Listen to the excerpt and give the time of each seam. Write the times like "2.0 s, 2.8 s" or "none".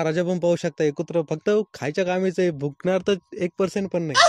none